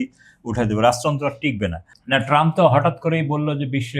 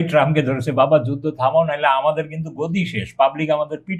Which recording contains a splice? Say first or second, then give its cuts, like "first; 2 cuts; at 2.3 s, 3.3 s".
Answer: first; 1 cut; at 1.9 s